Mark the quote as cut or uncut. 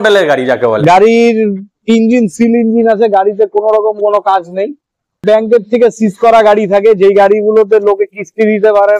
cut